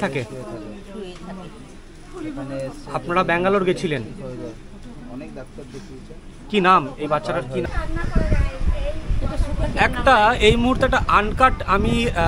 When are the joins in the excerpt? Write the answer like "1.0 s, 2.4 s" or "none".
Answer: 7.6 s